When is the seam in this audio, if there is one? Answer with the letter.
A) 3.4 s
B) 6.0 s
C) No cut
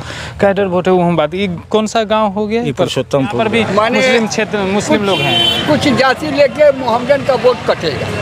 A